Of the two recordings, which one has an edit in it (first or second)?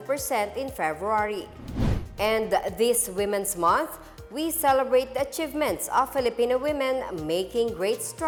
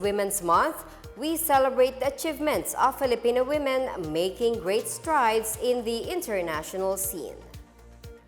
second